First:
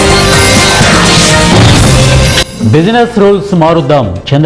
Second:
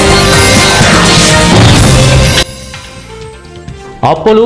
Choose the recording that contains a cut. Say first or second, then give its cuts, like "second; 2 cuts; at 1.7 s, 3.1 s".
first; 1 cut; at 2.5 s